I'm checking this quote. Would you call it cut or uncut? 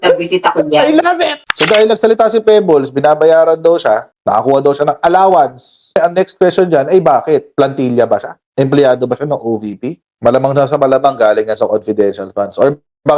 cut